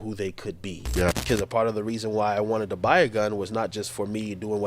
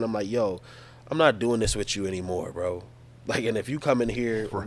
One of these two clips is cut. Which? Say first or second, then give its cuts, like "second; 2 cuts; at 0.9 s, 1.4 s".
first; 1 cut; at 1.2 s